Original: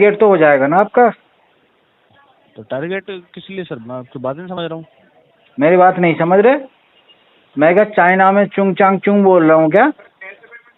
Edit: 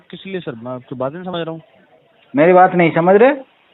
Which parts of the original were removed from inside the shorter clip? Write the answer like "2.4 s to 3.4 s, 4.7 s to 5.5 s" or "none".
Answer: none